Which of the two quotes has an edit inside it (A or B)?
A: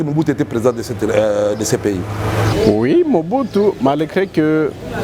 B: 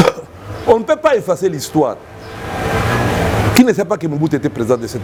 A